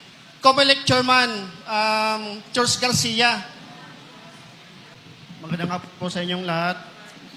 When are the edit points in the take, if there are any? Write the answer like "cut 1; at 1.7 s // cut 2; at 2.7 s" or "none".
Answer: cut 1; at 4.9 s